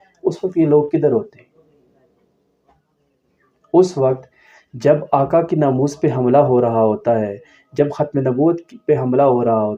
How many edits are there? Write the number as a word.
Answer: zero